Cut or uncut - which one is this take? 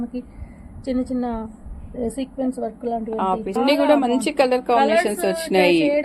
cut